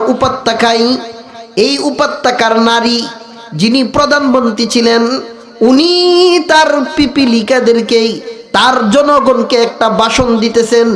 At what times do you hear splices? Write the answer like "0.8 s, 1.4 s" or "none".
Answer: none

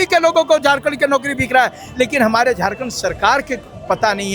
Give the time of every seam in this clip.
none

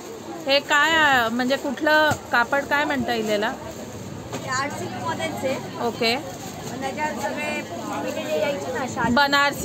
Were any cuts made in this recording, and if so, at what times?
none

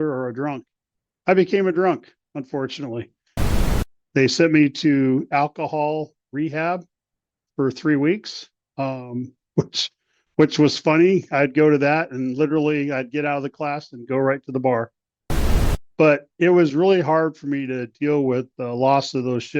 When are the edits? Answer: 3.4 s, 15.6 s

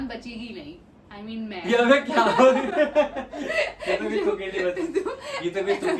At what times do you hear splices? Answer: none

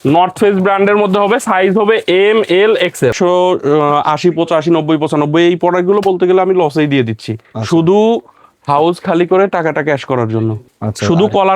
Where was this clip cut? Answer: 3.1 s, 10.7 s

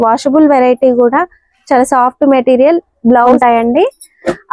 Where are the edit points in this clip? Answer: 3.3 s

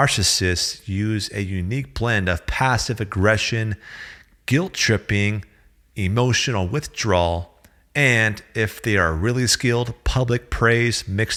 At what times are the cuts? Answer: none

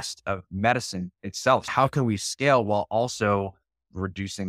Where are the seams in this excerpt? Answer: 1.7 s

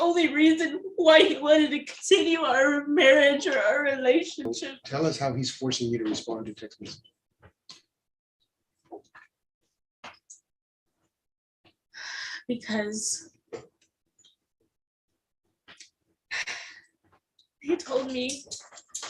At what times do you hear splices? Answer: 4.8 s

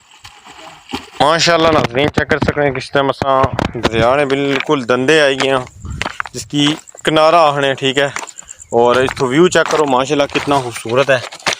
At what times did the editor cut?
1.4 s

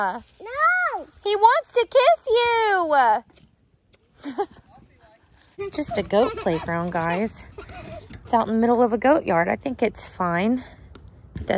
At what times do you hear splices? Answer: 5.7 s

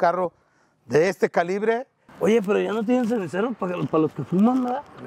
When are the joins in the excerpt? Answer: 2.0 s

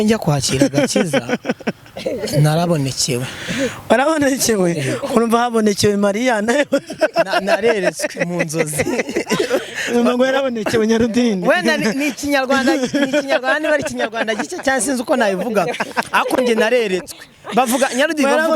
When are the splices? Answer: none

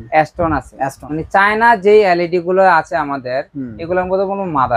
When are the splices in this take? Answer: 1.0 s

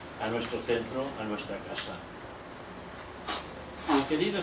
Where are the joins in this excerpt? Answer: none

